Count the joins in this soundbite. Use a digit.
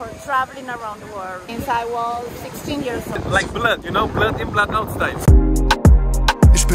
3